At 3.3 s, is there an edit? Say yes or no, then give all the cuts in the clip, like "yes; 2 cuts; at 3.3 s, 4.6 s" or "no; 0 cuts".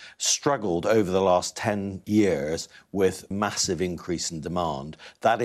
yes; 2 cuts; at 1.9 s, 3.3 s